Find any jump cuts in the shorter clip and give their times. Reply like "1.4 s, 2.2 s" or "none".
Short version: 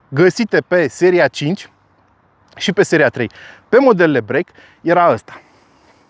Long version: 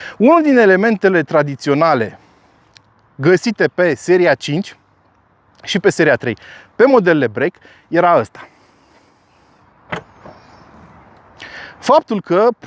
none